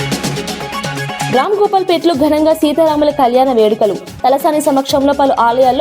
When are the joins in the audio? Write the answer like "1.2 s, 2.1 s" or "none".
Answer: 1.3 s